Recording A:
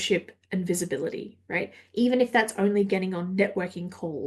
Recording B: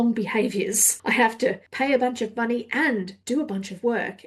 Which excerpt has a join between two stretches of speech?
B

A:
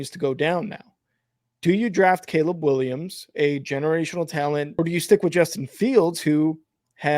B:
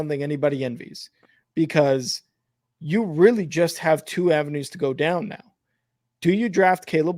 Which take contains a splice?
A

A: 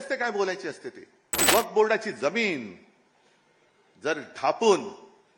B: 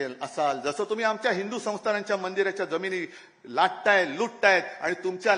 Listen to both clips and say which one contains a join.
A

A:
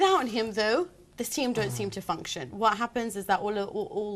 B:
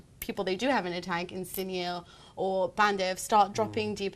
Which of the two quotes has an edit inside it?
B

